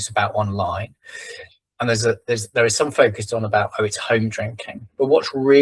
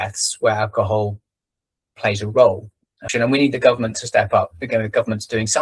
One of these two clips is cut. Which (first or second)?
second